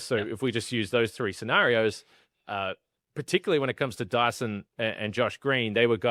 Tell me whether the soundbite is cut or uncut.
uncut